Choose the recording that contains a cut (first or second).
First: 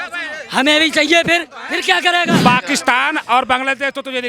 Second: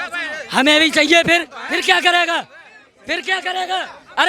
first